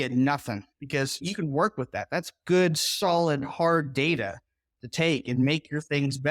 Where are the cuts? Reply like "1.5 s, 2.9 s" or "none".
2.0 s